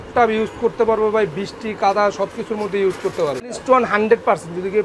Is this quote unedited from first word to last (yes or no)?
no